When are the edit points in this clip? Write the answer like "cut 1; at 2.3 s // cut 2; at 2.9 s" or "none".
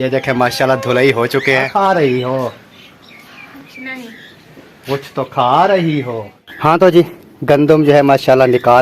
cut 1; at 1.7 s // cut 2; at 6.4 s